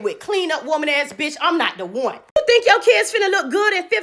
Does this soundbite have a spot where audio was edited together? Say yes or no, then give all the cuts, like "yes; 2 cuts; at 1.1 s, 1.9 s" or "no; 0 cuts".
no; 0 cuts